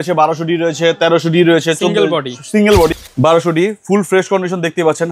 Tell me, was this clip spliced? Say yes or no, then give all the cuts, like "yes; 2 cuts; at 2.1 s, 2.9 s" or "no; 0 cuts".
yes; 1 cut; at 2.9 s